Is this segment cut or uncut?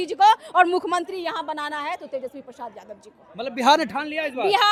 uncut